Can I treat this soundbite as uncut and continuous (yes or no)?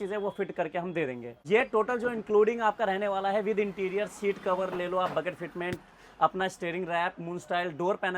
no